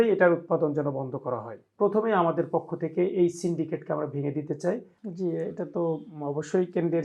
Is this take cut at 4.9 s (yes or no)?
yes